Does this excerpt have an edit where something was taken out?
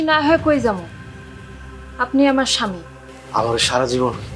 no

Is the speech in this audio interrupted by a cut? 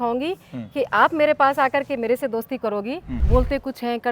yes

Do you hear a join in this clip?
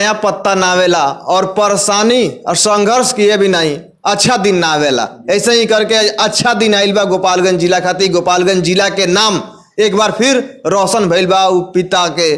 no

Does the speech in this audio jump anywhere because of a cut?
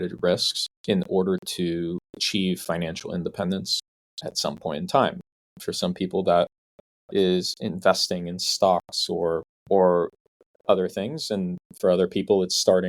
no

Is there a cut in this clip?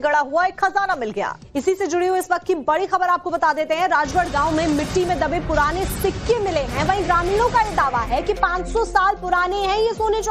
yes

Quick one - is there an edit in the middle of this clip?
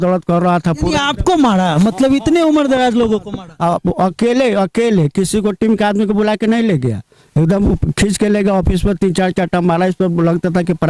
no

